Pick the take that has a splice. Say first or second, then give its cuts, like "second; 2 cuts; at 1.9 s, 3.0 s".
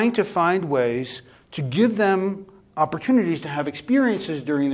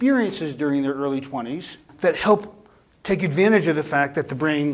second; 1 cut; at 1.9 s